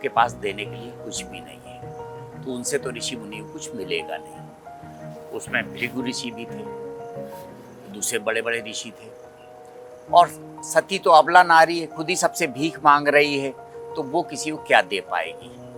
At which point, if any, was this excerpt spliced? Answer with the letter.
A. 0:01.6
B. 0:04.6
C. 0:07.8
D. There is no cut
D